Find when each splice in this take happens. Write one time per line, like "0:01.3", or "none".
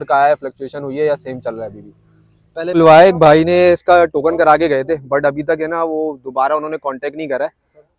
0:02.8